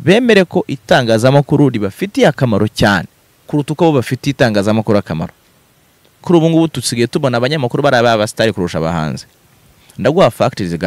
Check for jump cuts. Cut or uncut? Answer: cut